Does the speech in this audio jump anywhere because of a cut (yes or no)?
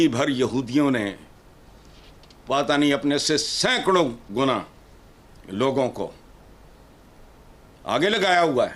no